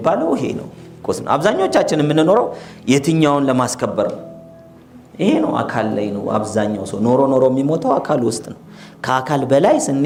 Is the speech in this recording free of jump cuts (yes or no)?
yes